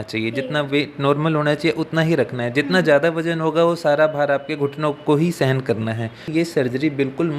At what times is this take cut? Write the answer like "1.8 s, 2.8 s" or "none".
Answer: 6.3 s